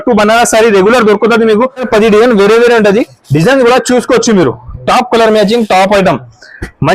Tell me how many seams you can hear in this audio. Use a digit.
1